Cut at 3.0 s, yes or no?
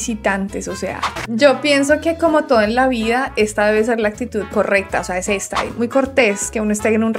no